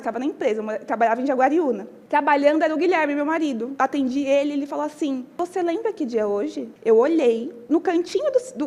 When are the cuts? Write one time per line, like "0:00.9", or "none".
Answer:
0:01.9
0:03.7
0:05.3
0:06.7
0:07.7